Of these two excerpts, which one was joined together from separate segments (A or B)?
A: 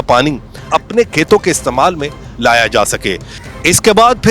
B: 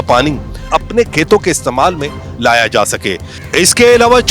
B